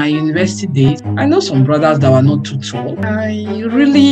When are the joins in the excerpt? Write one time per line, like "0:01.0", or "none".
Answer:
0:00.9
0:03.0